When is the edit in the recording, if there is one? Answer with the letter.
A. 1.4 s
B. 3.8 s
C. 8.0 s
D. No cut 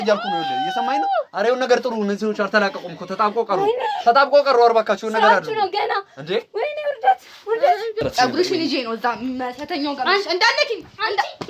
C